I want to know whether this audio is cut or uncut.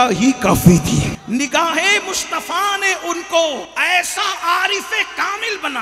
cut